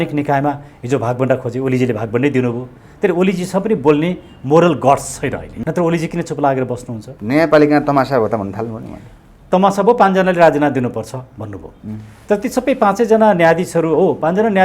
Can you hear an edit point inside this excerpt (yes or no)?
yes